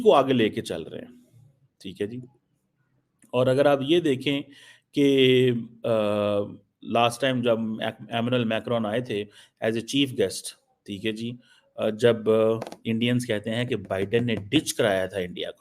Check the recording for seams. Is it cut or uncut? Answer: uncut